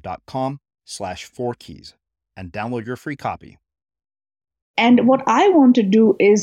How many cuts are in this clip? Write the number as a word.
one